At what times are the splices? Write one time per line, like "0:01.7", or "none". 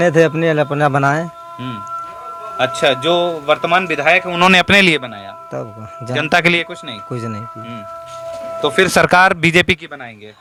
none